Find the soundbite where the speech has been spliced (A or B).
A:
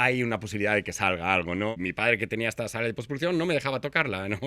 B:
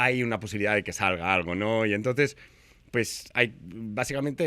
A